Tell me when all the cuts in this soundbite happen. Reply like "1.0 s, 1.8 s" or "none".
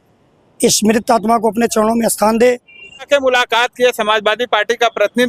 3.1 s